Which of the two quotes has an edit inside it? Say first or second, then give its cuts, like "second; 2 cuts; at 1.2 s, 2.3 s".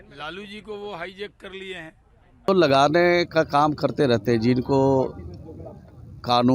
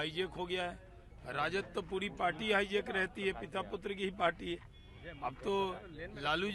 first; 1 cut; at 2.4 s